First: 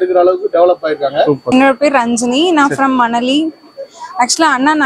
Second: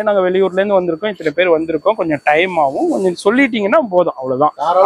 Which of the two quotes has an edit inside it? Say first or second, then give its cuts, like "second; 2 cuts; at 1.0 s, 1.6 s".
first; 1 cut; at 1.4 s